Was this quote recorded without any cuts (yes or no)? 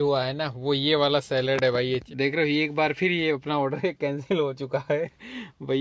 no